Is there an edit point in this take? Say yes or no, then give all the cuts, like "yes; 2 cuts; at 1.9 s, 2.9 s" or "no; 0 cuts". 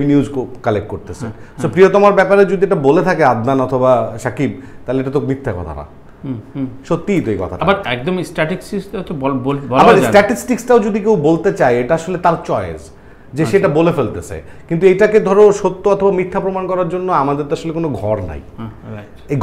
no; 0 cuts